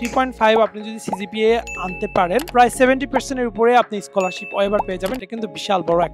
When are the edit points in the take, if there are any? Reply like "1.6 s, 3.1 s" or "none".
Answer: 2.5 s, 5.2 s